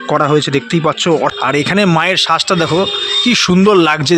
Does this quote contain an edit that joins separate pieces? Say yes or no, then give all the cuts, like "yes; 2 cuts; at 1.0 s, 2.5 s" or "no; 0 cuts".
yes; 1 cut; at 1.3 s